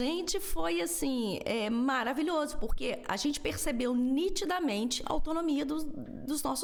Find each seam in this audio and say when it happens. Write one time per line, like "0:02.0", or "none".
none

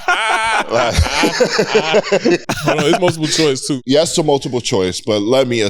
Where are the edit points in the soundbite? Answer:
0:02.4
0:03.7

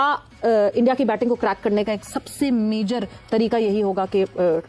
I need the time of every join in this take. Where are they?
none

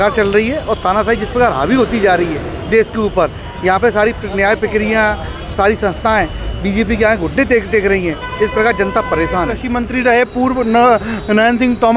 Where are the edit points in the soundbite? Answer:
0:09.6

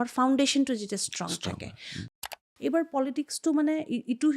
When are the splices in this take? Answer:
0:02.2

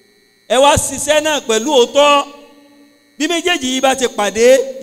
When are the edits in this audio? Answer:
none

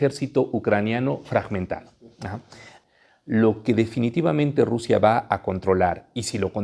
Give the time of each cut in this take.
0:02.7

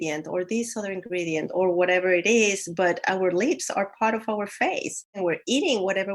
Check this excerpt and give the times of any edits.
0:05.2

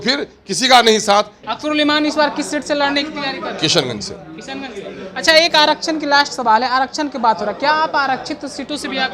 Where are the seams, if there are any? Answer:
0:01.4

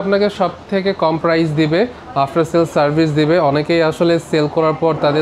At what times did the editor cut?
none

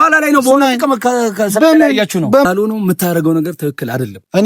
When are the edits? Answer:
0:02.4

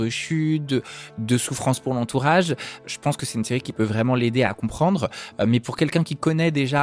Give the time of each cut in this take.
none

